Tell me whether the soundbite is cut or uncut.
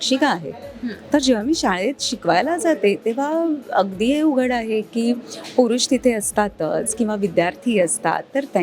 uncut